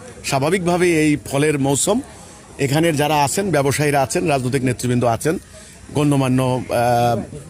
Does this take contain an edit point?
no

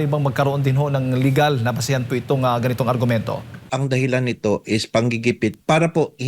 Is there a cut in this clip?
yes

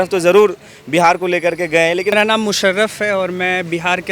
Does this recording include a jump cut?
yes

